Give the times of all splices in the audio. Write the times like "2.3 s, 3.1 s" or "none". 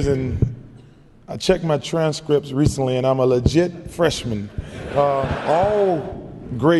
5.4 s